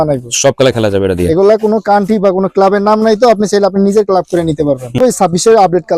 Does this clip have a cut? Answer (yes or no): yes